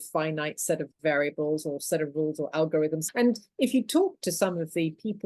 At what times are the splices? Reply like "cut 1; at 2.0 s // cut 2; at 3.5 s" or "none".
cut 1; at 3.0 s